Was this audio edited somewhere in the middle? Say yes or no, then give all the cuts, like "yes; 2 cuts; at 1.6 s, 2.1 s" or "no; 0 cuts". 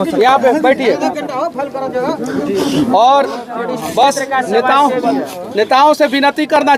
no; 0 cuts